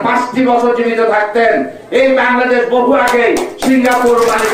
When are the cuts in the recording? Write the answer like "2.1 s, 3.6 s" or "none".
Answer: none